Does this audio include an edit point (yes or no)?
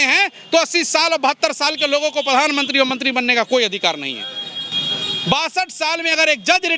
no